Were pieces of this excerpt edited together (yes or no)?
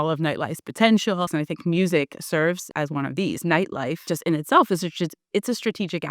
yes